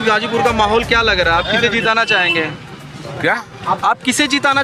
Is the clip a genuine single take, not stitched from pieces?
yes; 0 cuts

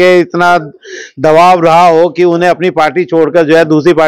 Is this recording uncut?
yes; 0 cuts

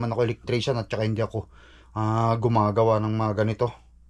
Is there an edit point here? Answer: no; 0 cuts

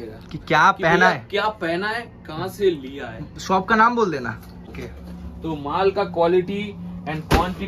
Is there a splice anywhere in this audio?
yes; 1 cut; at 4.7 s

